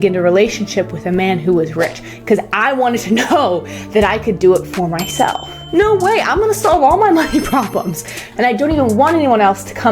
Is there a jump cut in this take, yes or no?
yes